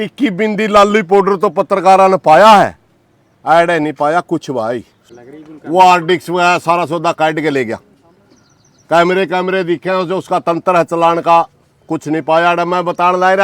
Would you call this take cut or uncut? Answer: cut